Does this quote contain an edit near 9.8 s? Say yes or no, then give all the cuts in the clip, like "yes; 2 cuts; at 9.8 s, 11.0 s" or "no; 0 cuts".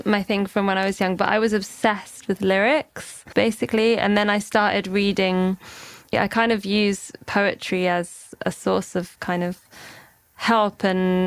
no; 3 cuts; at 3.1 s, 6.1 s, 8.3 s